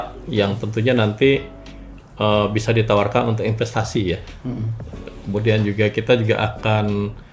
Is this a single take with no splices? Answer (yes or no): yes